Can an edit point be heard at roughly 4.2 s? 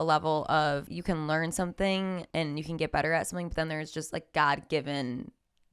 no; 2 cuts; at 0.9 s, 2.2 s

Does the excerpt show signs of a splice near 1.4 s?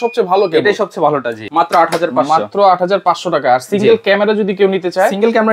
yes; 1 cut; at 1.4 s

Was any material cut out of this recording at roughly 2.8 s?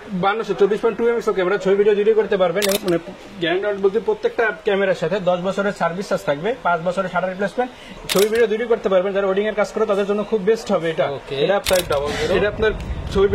yes; 3 cuts; at 2.8 s, 8.0 s, 11.6 s

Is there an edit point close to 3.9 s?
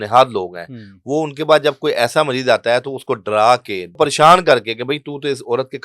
yes; 1 cut; at 3.9 s

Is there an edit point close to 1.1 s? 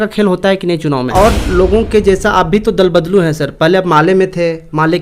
yes; 1 cut; at 1.1 s

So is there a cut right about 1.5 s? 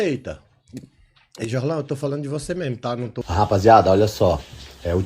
no; 1 cut; at 3.2 s

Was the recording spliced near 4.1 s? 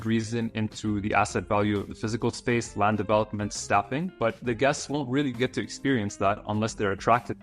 yes; 1 cut; at 4.1 s

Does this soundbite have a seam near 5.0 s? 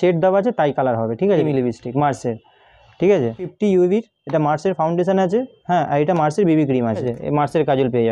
no; 3 cuts; at 1.4 s, 3.5 s, 7.1 s

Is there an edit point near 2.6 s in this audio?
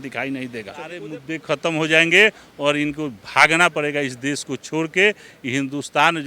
no; 1 cut; at 1.1 s

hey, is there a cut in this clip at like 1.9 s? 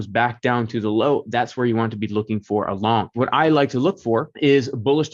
no; 2 cuts; at 3.2 s, 4.3 s

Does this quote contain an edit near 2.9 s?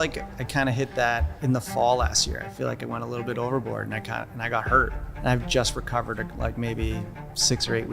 no; 1 cut; at 5.0 s

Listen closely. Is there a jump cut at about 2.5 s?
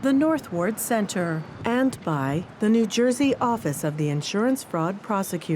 yes; 1 cut; at 2.5 s

